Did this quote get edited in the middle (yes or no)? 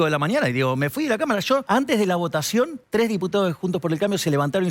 yes